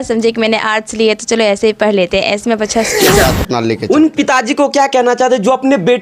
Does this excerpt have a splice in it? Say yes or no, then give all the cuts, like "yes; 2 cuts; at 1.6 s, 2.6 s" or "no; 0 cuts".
yes; 1 cut; at 3.0 s